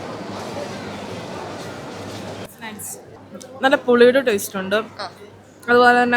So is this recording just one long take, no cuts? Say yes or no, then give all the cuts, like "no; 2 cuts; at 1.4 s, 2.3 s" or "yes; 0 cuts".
no; 1 cut; at 3.1 s